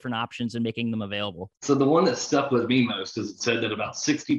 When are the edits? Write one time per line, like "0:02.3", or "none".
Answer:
0:01.5